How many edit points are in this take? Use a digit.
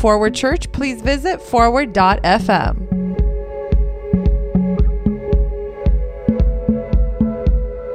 1